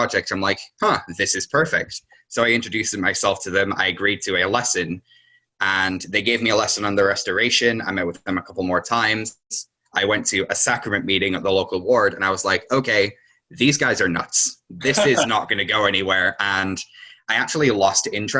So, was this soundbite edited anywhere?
no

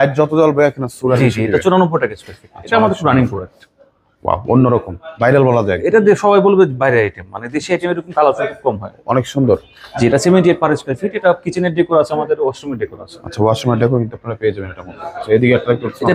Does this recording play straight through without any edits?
yes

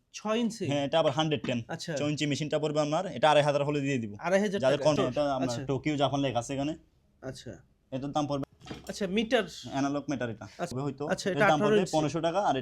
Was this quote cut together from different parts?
yes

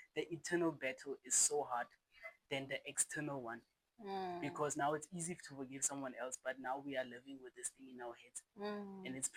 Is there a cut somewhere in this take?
no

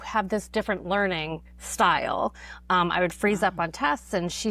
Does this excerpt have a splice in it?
no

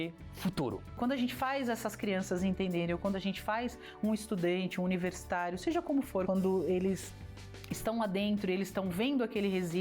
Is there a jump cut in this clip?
yes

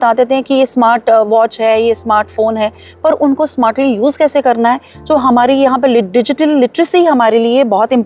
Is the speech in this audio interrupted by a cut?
no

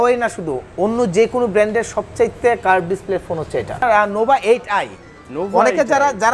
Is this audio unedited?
yes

